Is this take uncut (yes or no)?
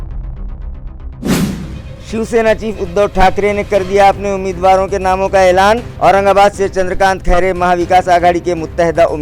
yes